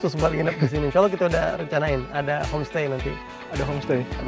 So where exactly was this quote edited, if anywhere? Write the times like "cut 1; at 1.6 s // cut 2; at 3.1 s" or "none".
none